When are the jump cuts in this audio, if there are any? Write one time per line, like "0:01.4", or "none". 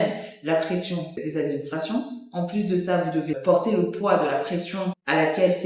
none